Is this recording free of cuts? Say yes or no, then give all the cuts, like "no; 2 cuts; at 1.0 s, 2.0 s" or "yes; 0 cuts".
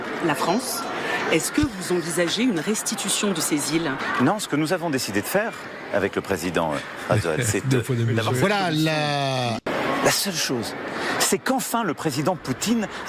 no; 2 cuts; at 4.0 s, 9.7 s